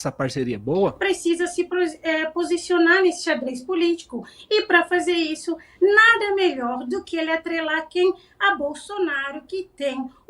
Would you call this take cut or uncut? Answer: cut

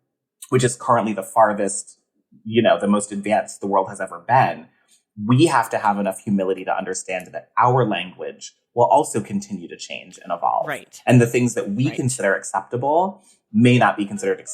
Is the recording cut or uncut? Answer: cut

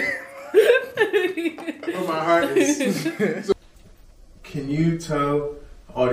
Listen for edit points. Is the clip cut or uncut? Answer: cut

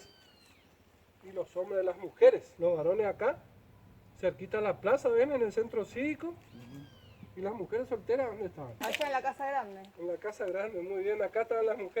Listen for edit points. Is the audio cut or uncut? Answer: cut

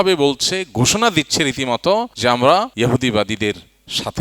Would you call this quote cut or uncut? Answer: cut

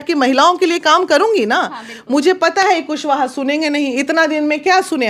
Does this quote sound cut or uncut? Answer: uncut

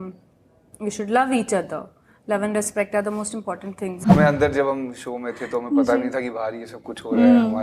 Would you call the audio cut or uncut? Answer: cut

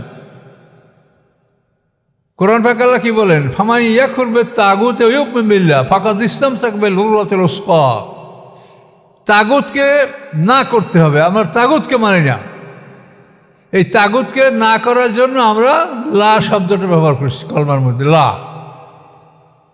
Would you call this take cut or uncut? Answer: uncut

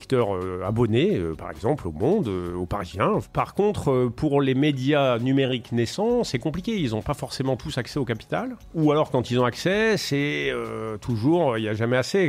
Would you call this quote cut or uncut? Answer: cut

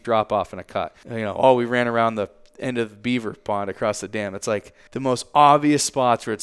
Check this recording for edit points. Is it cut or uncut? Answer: cut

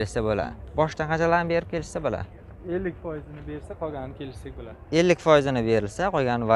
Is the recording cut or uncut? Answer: uncut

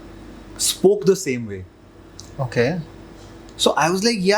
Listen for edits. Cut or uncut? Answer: uncut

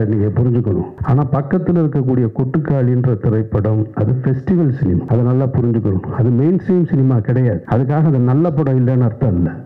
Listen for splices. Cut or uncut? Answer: cut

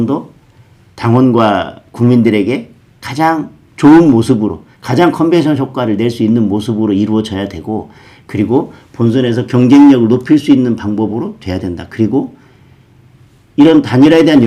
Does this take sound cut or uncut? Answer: uncut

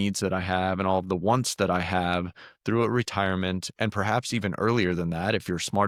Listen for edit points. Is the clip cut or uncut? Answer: uncut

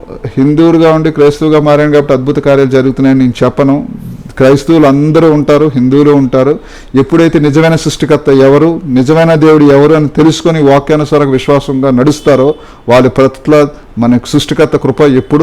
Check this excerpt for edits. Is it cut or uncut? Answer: uncut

